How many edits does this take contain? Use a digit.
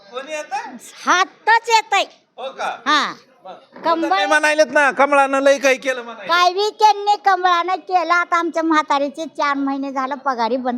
0